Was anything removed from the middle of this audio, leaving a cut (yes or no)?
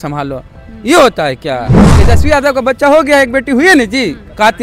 yes